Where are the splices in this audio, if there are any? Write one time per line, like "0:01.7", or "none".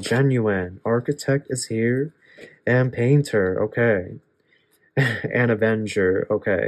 none